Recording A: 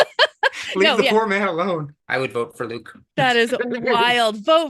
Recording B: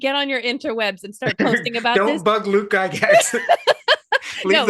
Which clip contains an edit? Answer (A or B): A